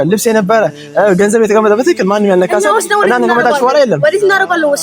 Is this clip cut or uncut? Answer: uncut